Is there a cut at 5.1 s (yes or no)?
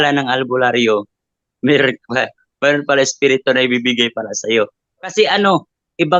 yes